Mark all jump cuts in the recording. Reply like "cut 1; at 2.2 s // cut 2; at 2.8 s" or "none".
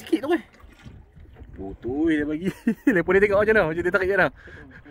none